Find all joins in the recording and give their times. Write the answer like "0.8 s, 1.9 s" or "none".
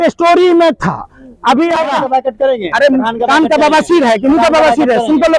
1.9 s